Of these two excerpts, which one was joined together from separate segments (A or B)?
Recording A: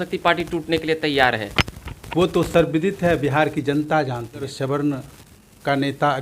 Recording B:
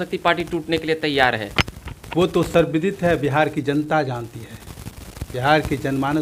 A